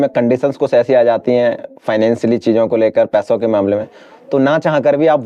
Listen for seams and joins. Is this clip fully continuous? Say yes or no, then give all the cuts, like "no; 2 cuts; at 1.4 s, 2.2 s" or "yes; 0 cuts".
yes; 0 cuts